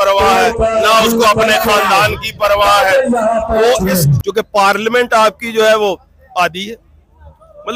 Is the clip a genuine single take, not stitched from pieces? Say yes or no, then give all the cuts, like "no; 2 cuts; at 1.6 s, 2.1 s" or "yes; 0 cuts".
no; 1 cut; at 4.2 s